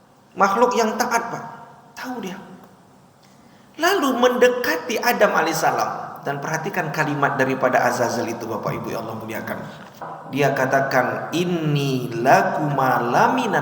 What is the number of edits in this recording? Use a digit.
1